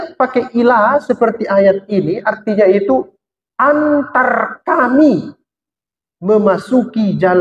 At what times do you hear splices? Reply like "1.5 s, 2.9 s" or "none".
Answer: none